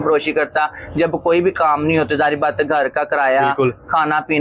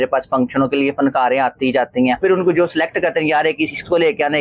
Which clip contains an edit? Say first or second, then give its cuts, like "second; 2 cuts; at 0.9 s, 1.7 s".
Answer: second; 1 cut; at 2.2 s